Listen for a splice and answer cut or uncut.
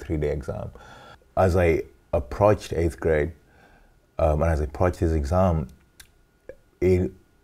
cut